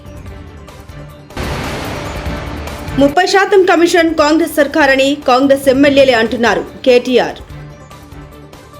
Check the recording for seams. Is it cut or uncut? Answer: cut